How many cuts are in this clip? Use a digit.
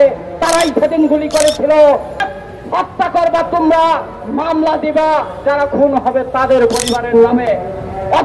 1